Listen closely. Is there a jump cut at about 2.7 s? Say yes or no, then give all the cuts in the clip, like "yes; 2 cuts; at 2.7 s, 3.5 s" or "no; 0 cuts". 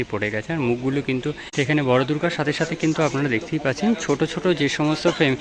no; 1 cut; at 1.4 s